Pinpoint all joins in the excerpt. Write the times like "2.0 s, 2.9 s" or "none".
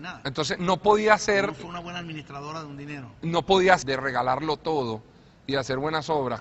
none